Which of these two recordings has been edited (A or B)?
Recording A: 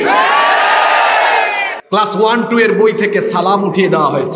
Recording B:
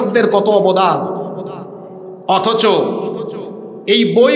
A